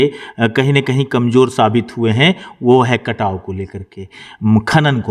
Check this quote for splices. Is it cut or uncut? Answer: uncut